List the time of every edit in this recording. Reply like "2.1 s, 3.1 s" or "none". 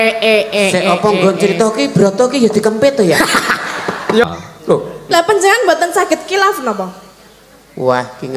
4.2 s

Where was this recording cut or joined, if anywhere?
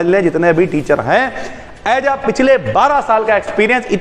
none

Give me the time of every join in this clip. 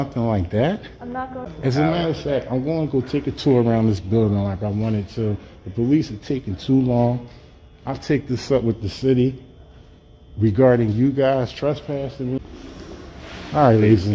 1.4 s, 12.4 s

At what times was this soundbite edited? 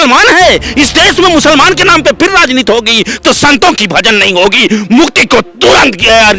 none

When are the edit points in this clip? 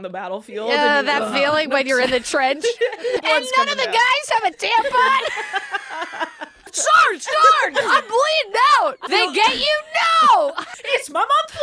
3.2 s, 6.7 s, 9.0 s, 10.7 s

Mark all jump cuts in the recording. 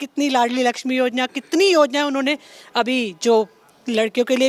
none

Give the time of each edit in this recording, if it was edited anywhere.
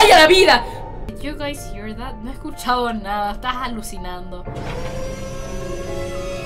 1.0 s

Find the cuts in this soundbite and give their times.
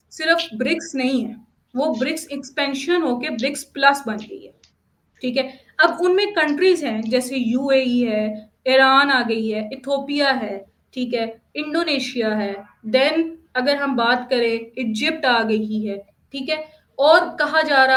none

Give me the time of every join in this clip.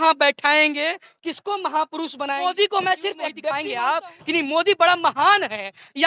2.4 s, 3.7 s

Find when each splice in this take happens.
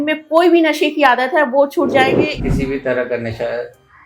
2.4 s

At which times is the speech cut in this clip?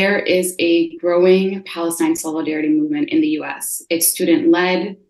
none

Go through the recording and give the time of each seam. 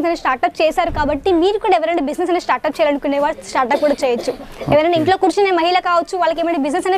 none

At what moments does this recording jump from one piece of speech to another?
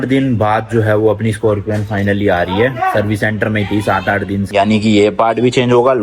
4.5 s

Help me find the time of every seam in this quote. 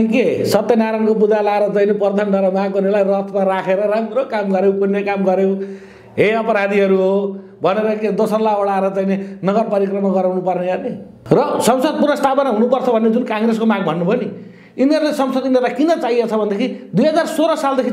11.1 s

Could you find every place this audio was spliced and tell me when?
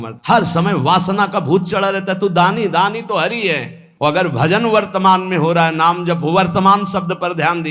3.8 s

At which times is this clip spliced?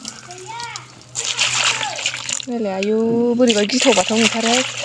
none

